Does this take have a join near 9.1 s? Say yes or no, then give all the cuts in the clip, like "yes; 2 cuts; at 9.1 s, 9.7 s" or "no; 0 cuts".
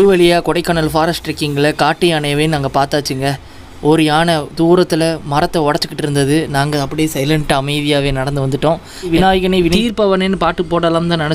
yes; 1 cut; at 9.1 s